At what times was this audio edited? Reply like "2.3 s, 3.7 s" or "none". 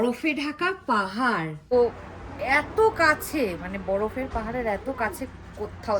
1.7 s